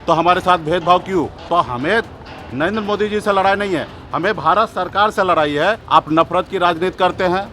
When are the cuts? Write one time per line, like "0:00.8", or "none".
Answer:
0:01.3
0:05.8